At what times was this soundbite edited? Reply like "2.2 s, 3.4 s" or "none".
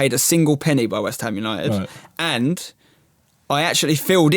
none